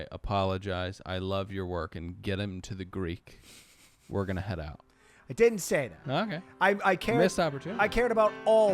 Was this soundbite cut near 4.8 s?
no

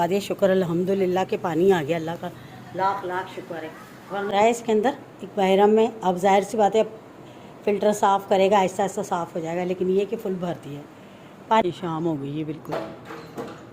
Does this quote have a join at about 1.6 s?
no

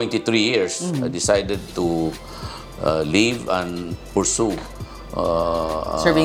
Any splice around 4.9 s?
no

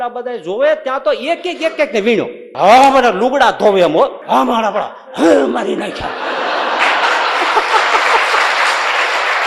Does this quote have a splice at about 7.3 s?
no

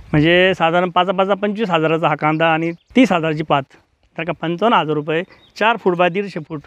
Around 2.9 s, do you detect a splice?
yes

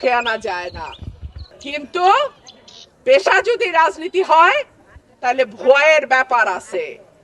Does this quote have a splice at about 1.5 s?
yes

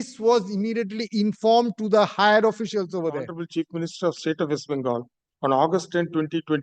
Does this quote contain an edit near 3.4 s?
yes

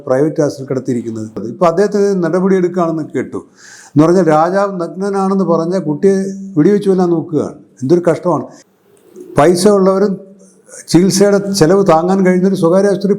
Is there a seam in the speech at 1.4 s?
yes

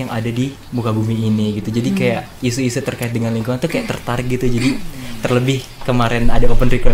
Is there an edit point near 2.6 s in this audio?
no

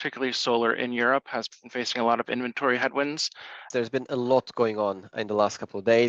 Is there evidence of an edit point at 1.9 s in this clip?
no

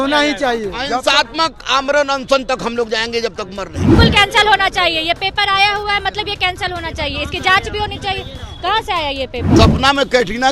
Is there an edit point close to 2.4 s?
no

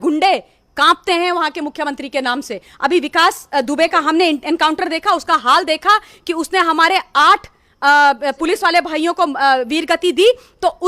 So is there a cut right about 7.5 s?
no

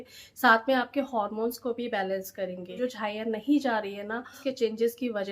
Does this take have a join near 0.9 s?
no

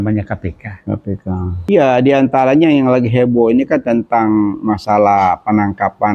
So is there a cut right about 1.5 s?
yes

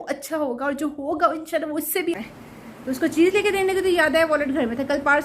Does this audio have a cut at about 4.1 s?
no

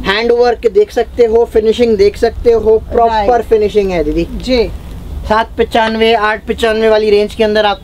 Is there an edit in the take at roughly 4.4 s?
no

